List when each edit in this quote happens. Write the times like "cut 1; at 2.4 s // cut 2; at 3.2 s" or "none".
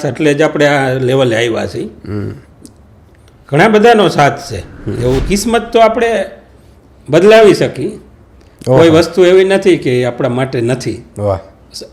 cut 1; at 5.2 s

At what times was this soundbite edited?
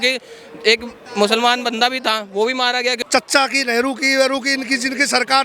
cut 1; at 3.0 s

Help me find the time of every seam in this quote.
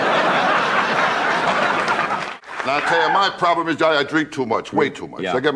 cut 1; at 2.4 s

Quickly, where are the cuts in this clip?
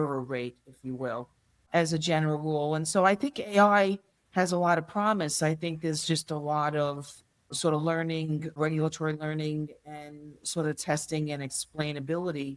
cut 1; at 1.7 s // cut 2; at 7.5 s

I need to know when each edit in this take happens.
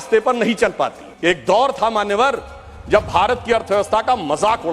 cut 1; at 1.1 s

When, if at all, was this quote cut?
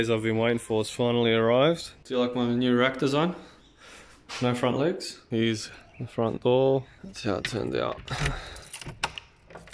cut 1; at 1.9 s // cut 2; at 5.2 s // cut 3; at 7.0 s

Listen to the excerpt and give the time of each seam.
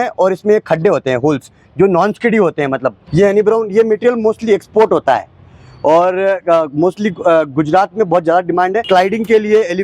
cut 1; at 3.0 s // cut 2; at 8.8 s

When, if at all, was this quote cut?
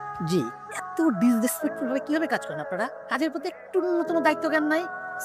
none

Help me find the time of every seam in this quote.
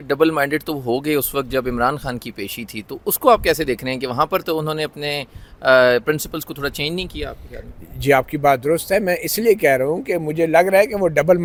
none

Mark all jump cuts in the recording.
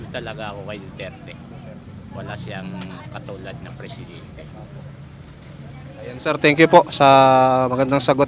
none

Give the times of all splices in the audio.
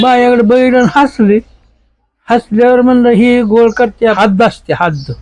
cut 1; at 4.2 s

